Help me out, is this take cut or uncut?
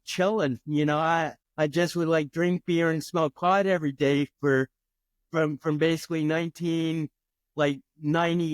cut